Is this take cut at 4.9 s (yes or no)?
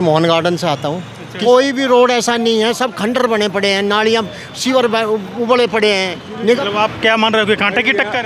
no